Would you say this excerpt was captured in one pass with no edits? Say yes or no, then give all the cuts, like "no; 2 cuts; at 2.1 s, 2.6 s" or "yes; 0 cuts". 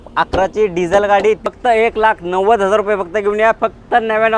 no; 2 cuts; at 1.5 s, 3.6 s